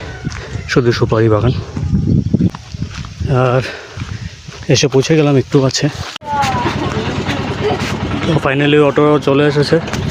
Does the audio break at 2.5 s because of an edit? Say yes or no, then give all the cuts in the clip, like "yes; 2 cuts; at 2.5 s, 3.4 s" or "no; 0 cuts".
yes; 2 cuts; at 2.5 s, 6.2 s